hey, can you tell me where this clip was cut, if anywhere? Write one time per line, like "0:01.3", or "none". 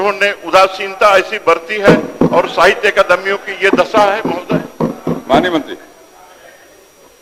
none